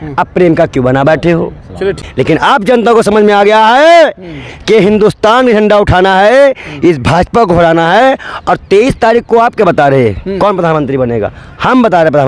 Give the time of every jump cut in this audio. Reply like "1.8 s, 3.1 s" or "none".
2.0 s